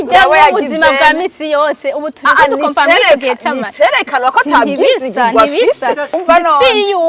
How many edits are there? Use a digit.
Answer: 1